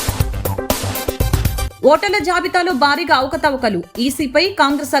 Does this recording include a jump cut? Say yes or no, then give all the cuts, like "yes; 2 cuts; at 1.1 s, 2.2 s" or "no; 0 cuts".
yes; 1 cut; at 1.7 s